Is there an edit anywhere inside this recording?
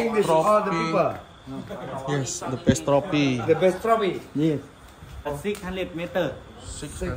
yes; 1 cut; at 5.3 s

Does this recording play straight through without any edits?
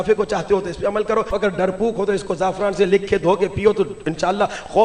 no; 1 cut; at 1.3 s

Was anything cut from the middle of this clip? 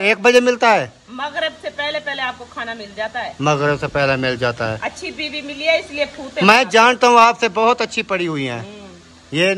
no; 0 cuts

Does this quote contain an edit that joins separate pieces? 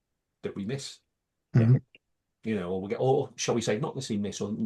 no; 0 cuts

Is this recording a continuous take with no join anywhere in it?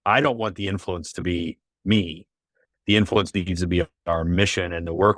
yes; 0 cuts

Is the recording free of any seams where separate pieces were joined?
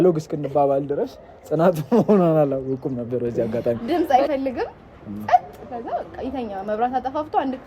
no; 1 cut; at 3.8 s

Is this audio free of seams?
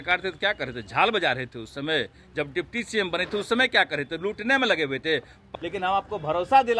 no; 1 cut; at 5.4 s

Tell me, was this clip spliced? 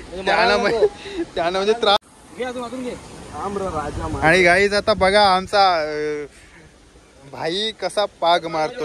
yes; 1 cut; at 2.0 s

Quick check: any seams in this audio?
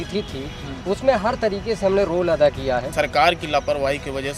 yes; 1 cut; at 2.9 s

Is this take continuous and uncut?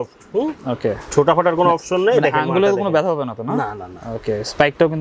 yes; 0 cuts

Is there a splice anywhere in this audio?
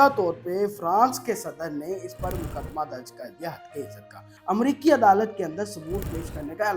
yes; 1 cut; at 4.2 s

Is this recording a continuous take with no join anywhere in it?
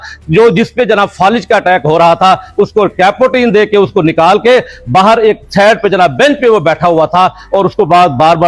yes; 0 cuts

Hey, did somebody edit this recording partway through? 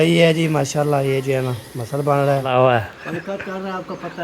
yes; 1 cut; at 2.5 s

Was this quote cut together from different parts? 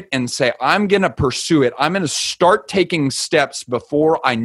no; 0 cuts

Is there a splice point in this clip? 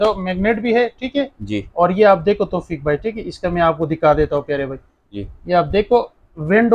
no; 0 cuts

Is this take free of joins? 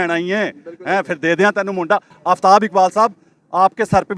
no; 1 cut; at 2.1 s

